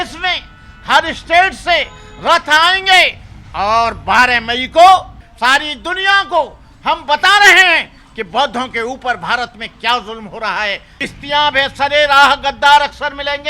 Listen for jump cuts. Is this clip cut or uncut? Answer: cut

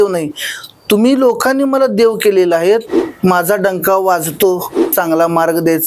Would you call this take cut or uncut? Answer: cut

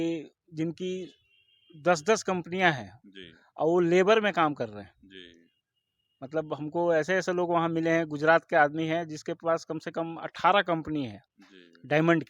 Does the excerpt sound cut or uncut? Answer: uncut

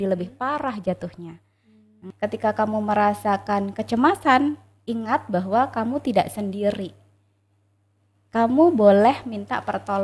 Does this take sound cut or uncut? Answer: cut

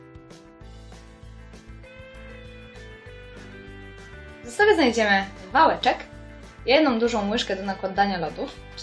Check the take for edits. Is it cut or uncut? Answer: cut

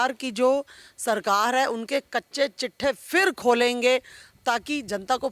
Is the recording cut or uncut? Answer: uncut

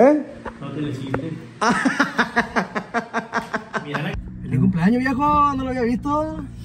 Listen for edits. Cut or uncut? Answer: cut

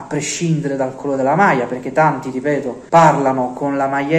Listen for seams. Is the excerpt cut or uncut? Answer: cut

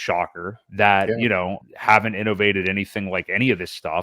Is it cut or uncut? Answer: cut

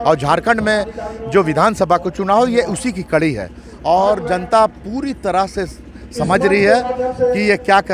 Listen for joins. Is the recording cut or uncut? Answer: uncut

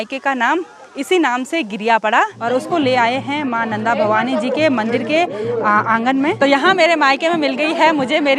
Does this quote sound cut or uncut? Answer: cut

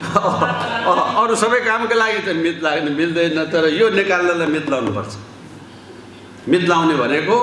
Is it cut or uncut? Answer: uncut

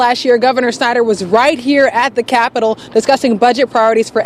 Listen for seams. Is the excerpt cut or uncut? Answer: uncut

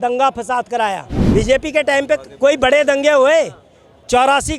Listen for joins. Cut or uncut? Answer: cut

